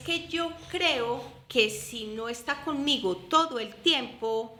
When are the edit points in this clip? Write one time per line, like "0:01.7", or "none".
none